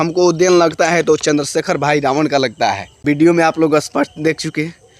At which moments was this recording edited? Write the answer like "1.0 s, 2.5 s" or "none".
2.9 s